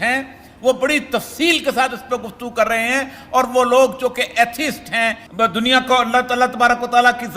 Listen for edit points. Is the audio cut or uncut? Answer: cut